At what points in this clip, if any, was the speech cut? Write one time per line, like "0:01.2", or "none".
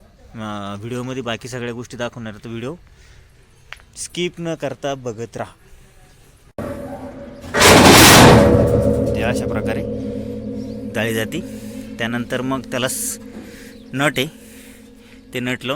0:06.6